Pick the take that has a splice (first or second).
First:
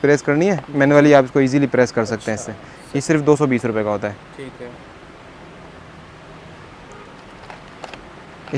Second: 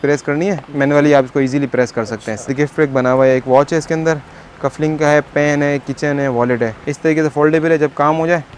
second